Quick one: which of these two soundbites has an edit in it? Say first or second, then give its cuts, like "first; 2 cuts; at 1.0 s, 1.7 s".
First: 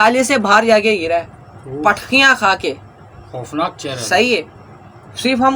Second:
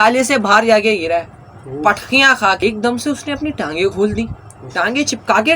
second; 1 cut; at 2.6 s